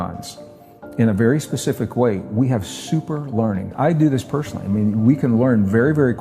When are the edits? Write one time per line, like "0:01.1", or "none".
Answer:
0:03.7